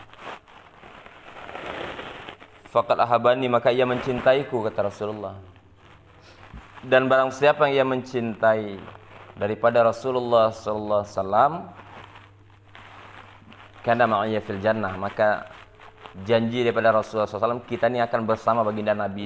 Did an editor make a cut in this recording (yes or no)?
no